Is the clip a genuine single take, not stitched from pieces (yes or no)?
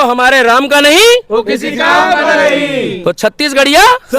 no